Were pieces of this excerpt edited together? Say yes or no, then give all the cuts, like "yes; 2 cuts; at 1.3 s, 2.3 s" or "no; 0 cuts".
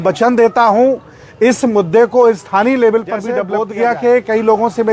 yes; 1 cut; at 3.4 s